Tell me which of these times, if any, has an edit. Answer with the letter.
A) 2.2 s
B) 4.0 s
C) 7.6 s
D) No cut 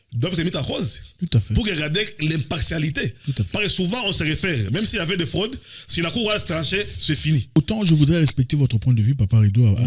C